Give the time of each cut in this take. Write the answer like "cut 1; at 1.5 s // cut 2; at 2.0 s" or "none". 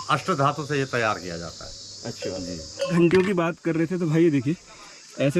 cut 1; at 2.9 s